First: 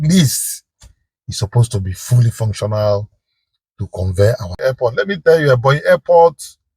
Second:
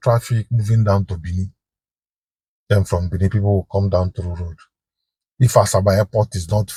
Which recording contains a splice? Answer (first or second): first